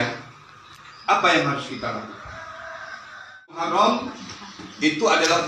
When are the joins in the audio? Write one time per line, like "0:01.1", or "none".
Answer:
0:03.6